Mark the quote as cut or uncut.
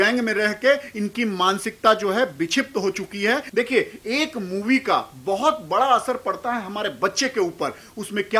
cut